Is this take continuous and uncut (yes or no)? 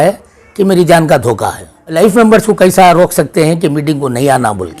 no